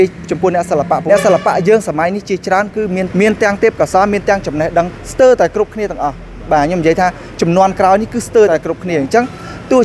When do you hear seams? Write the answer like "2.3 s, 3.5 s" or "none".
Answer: 1.0 s, 3.1 s, 5.0 s, 8.5 s